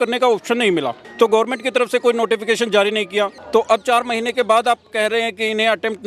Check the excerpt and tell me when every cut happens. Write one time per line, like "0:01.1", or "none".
0:01.0
0:03.4

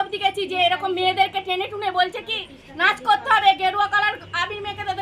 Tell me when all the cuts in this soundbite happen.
none

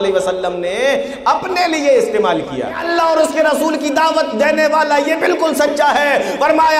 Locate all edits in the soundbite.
0:02.8

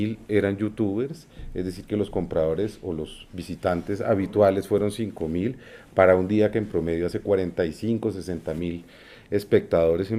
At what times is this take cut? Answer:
none

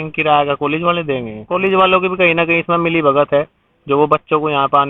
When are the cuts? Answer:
0:01.3

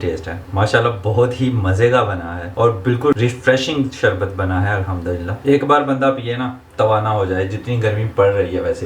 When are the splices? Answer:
0:05.3

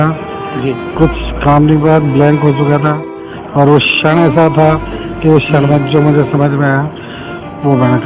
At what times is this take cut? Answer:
none

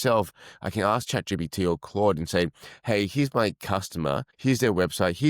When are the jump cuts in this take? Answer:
0:04.3

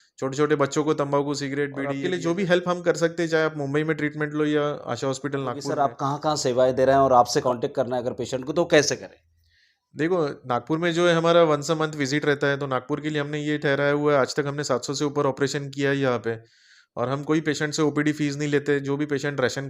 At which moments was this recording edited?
0:01.8
0:05.7
0:07.4

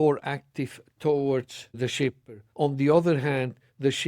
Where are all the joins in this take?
0:01.9

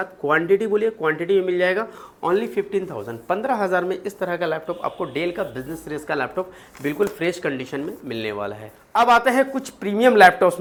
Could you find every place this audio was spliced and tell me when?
none

